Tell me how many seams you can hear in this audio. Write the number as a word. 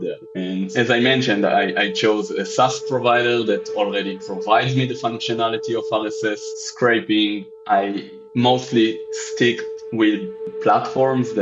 one